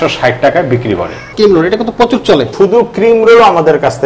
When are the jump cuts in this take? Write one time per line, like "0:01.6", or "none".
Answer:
0:01.3
0:02.5